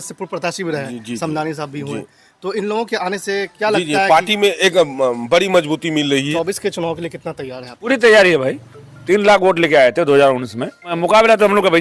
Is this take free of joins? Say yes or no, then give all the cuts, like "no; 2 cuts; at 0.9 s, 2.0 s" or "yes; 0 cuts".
no; 4 cuts; at 6.3 s, 7.9 s, 9.0 s, 10.9 s